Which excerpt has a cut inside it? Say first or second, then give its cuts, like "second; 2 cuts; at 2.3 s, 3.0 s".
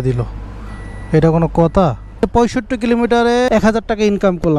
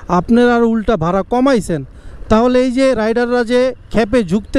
first; 2 cuts; at 2.2 s, 3.5 s